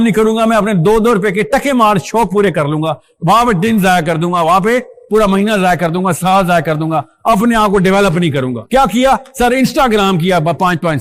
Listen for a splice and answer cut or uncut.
uncut